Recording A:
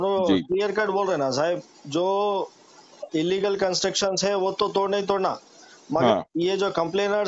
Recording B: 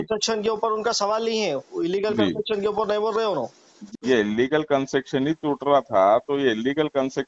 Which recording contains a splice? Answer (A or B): B